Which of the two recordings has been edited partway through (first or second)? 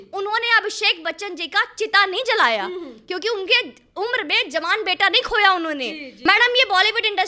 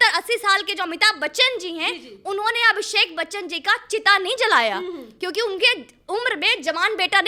first